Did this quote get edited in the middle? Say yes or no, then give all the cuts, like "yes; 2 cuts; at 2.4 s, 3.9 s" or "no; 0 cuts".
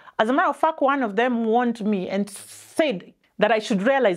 yes; 1 cut; at 3.1 s